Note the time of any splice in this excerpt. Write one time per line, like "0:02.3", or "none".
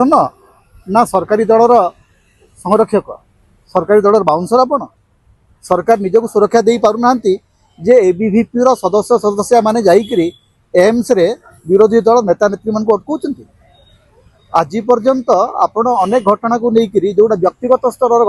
none